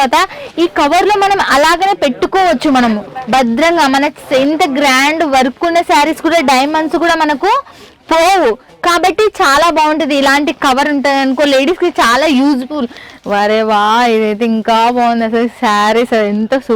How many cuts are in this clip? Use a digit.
1